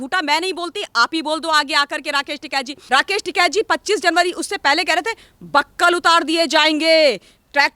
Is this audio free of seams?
no; 1 cut; at 2.8 s

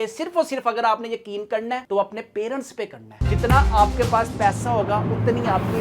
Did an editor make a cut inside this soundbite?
yes; 1 cut; at 3.2 s

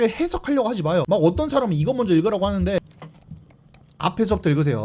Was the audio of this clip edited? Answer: no; 0 cuts

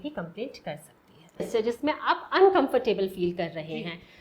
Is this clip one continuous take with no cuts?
no; 1 cut; at 1.5 s

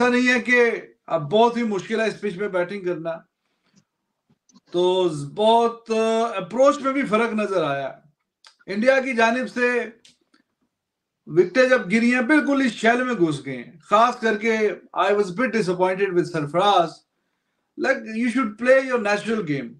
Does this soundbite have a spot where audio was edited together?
yes; 1 cut; at 8.0 s

